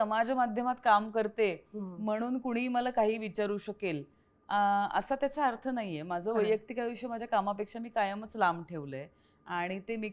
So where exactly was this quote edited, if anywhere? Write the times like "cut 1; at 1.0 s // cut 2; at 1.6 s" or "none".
none